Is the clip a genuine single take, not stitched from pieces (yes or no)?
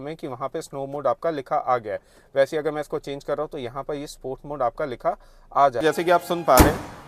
no